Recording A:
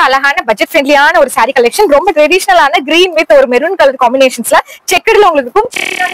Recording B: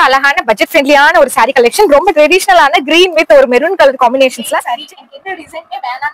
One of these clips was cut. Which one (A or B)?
B